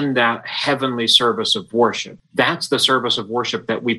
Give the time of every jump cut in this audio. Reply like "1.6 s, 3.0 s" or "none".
2.1 s